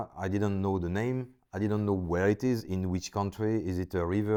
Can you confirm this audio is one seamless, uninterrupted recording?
yes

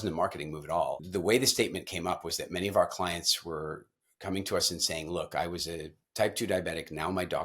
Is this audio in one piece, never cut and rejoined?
no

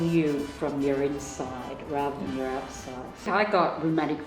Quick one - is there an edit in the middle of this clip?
yes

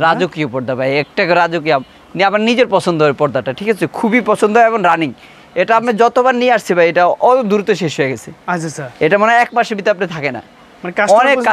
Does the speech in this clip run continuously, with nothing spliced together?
yes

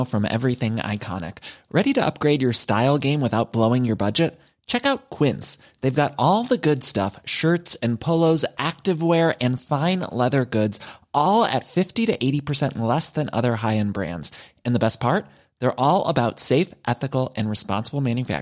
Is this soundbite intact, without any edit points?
yes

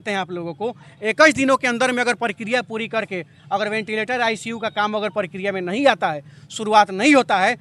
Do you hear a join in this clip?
no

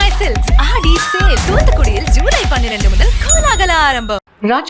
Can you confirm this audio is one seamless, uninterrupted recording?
yes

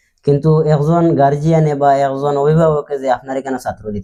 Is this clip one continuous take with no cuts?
yes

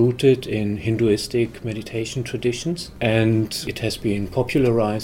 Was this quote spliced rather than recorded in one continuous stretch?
yes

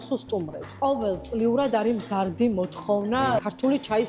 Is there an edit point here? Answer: no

